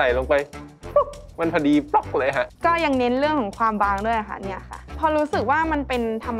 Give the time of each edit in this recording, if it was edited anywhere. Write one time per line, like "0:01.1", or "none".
0:02.5
0:04.9